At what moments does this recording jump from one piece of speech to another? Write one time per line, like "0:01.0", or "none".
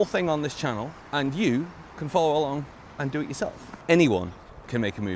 0:01.0
0:03.7